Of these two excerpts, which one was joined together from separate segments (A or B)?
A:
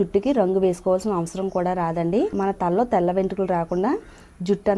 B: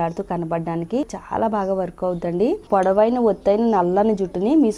B